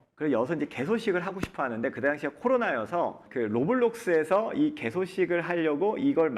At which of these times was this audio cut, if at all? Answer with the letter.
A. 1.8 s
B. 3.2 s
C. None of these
B